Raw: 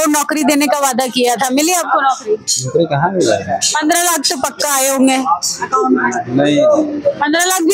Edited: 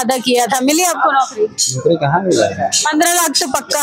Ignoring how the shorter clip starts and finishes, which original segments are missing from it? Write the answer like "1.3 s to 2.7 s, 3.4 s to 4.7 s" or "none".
none